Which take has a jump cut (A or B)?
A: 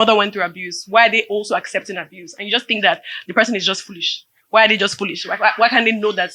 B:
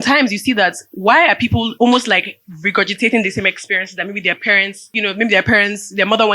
B